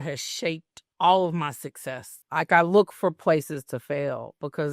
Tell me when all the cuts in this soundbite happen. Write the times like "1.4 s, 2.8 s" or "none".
2.2 s